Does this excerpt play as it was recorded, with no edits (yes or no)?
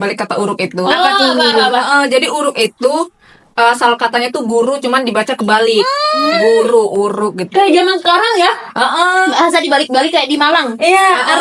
yes